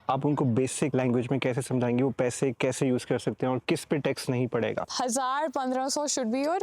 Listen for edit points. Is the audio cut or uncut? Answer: cut